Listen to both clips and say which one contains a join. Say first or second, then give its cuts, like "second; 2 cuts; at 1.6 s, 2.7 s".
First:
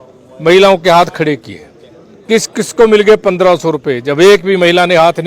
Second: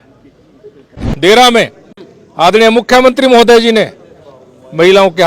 second; 1 cut; at 1.1 s